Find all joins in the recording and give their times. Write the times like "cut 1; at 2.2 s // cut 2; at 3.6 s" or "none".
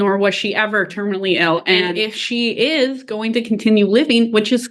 cut 1; at 1.9 s

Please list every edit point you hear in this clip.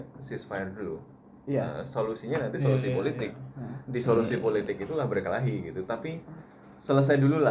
none

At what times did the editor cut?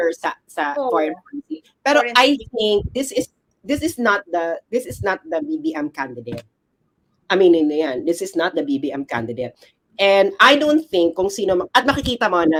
none

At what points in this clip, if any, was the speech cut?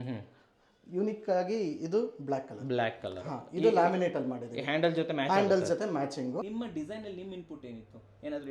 cut 1; at 6.4 s

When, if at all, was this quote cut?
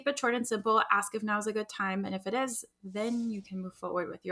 none

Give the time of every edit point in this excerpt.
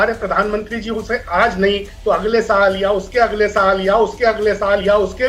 none

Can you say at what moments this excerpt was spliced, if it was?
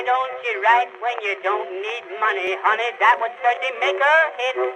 cut 1; at 2.4 s

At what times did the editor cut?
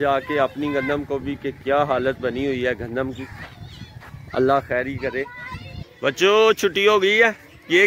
cut 1; at 5.8 s

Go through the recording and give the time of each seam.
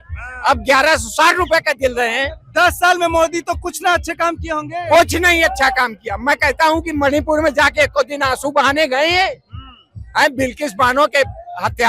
none

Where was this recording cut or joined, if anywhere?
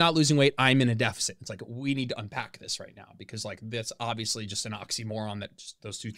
none

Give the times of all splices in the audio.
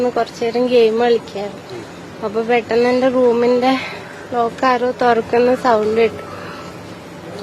cut 1; at 5.6 s

